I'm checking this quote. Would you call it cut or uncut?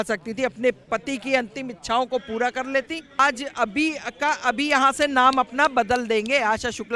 cut